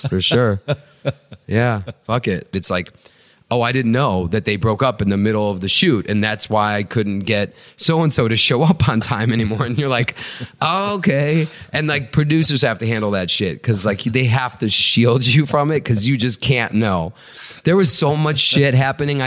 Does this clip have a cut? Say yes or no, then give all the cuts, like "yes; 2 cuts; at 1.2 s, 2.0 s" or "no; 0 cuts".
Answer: yes; 1 cut; at 2.5 s